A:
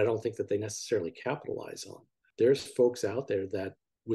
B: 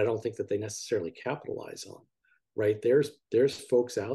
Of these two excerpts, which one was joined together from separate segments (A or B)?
A